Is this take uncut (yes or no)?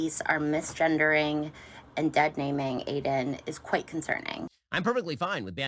no